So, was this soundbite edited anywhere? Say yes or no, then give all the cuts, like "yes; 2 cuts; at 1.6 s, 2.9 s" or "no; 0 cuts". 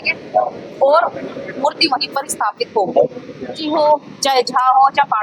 yes; 1 cut; at 3.6 s